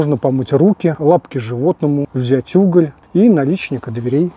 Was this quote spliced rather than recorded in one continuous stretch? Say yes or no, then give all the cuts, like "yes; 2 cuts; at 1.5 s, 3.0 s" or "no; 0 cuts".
yes; 3 cuts; at 1.0 s, 2.1 s, 3.0 s